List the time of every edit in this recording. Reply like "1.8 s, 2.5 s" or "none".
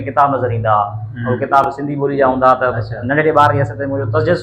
none